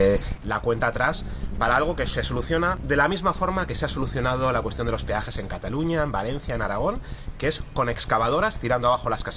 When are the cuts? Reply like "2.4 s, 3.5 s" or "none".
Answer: none